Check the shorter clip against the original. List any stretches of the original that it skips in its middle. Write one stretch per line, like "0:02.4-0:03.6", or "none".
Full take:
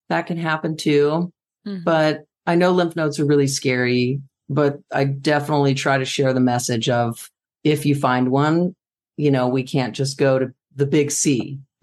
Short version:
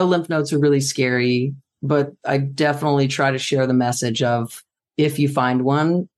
none